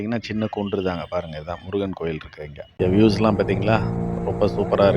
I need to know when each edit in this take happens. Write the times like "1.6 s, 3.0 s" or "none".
2.7 s